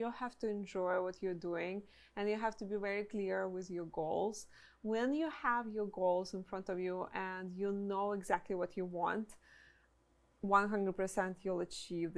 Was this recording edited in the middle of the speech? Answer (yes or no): no